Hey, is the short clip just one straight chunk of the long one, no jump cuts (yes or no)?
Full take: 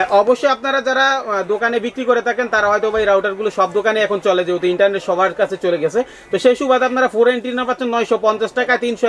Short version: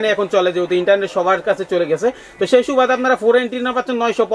yes